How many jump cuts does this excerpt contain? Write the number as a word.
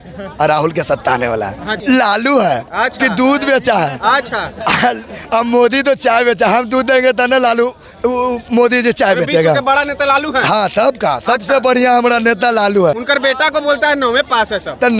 two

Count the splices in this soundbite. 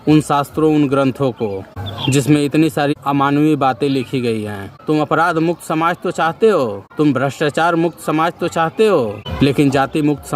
three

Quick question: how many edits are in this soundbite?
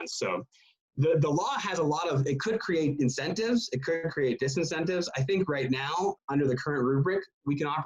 one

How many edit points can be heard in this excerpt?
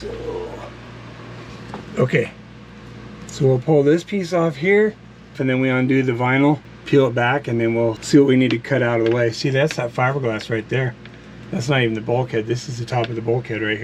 three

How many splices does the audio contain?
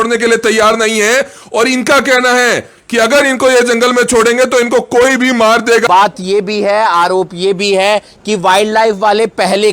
one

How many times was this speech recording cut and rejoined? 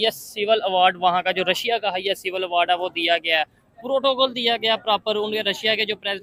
zero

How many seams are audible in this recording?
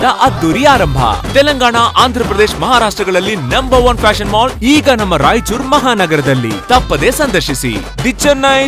zero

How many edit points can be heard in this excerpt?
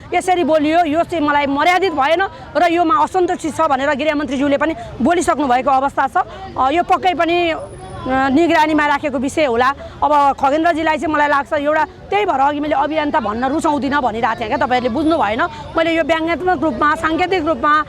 zero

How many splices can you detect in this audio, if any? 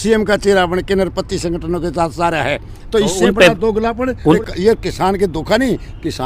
one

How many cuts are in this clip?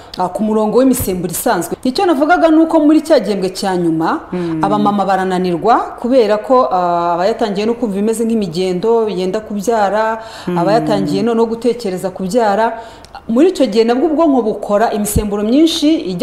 one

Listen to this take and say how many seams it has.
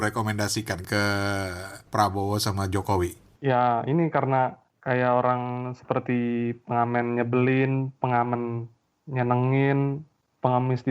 four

